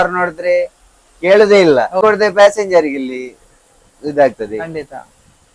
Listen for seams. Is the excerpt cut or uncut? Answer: cut